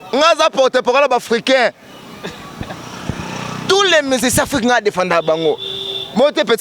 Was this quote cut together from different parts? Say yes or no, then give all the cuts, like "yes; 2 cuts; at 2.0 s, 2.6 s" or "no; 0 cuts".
no; 0 cuts